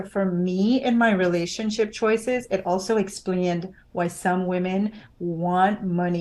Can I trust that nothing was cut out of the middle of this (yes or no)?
yes